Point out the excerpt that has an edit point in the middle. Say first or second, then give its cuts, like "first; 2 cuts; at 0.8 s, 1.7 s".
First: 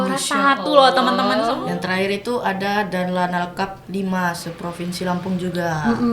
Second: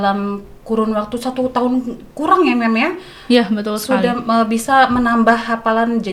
first; 1 cut; at 1.6 s